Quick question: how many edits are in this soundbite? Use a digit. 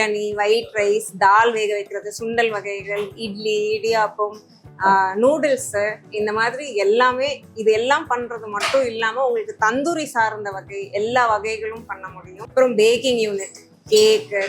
1